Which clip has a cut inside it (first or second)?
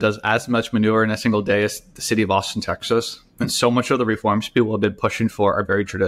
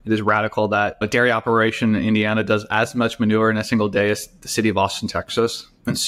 second